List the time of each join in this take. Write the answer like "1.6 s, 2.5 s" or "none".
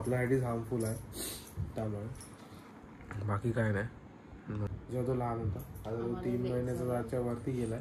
4.7 s